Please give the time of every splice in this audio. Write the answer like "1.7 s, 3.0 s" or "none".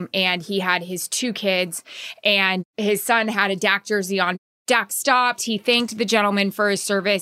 2.7 s, 4.4 s